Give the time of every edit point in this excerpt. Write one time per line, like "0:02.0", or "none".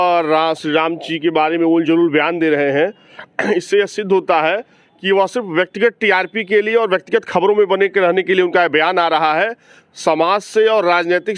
none